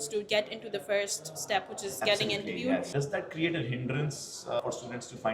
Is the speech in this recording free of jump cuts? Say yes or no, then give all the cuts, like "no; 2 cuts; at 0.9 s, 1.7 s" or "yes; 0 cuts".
no; 1 cut; at 2.9 s